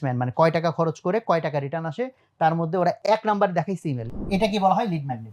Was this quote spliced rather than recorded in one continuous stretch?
yes; 2 cuts; at 3.0 s, 4.0 s

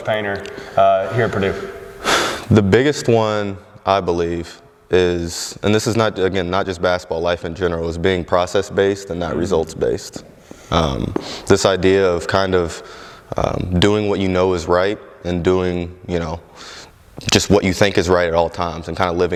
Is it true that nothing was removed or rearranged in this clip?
yes; 0 cuts

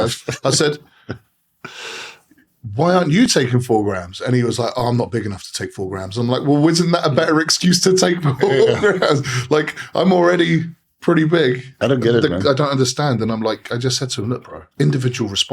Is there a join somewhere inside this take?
yes; 2 cuts; at 11.7 s, 14.6 s

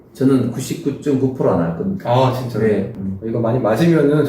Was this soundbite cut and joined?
yes; 1 cut; at 2.9 s

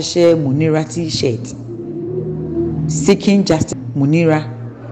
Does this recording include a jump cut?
no; 0 cuts

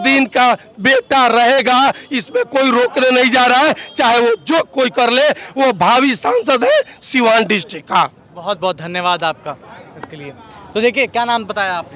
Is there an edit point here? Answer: no; 0 cuts

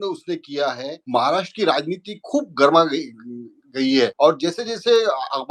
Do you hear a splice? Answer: yes; 2 cuts; at 0.9 s, 4.1 s

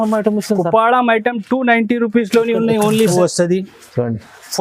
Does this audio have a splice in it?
yes; 1 cut; at 3.1 s

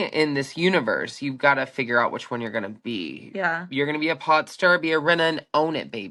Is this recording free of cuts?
yes; 0 cuts

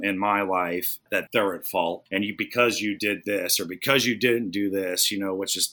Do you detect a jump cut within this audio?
yes; 2 cuts; at 1.0 s, 2.0 s

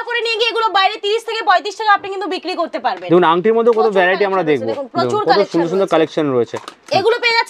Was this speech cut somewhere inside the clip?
no; 0 cuts

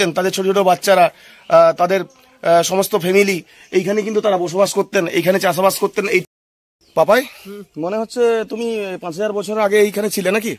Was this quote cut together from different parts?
yes; 1 cut; at 6.3 s

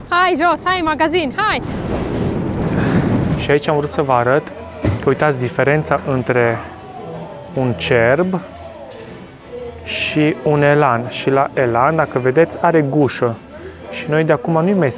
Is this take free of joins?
no; 1 cut; at 3.4 s

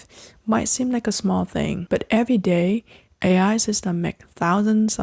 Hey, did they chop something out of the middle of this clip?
yes; 1 cut; at 1.8 s

